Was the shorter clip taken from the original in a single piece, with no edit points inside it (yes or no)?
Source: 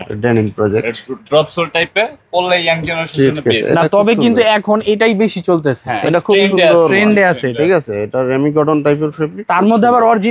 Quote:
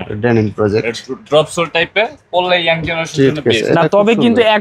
yes